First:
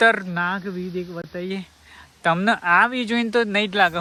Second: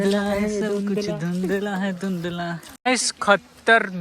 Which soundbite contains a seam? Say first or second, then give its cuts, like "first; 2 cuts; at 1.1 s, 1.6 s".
second; 1 cut; at 2.7 s